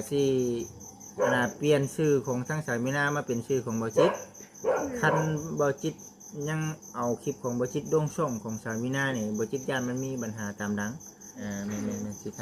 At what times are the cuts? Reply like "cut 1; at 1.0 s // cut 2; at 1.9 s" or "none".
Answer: cut 1; at 11.2 s